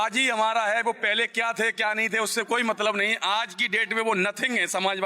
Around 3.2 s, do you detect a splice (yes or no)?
no